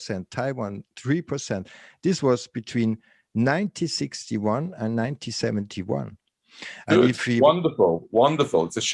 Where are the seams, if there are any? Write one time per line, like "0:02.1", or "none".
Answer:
none